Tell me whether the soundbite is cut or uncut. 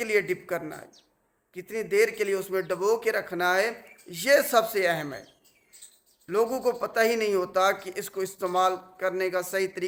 uncut